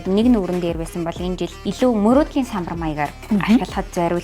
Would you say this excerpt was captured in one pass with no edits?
yes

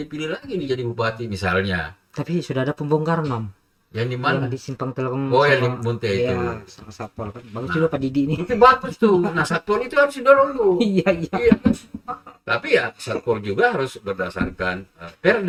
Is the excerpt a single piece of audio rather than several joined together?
yes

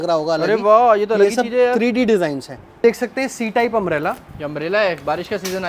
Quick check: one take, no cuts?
no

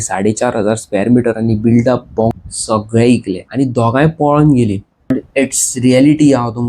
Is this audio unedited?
no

